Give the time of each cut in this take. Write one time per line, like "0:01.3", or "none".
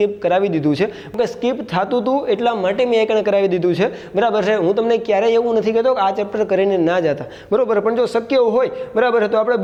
none